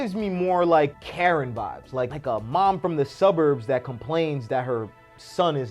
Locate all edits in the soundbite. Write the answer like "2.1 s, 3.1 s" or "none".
0.9 s, 2.1 s

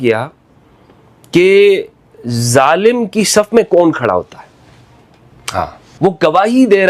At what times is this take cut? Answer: 5.8 s

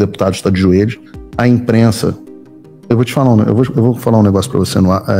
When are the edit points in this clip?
none

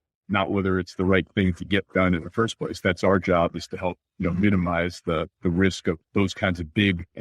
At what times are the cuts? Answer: 4.1 s, 5.3 s, 6.0 s

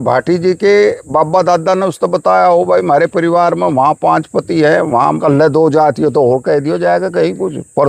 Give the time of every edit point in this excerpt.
5.2 s

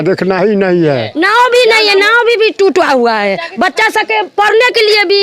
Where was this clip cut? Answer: 1.1 s

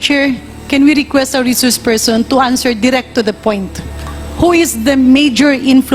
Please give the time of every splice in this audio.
none

